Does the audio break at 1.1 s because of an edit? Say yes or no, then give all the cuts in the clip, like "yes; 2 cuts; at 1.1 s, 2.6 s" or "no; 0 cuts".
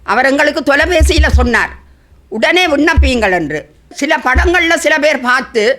no; 1 cut; at 4.0 s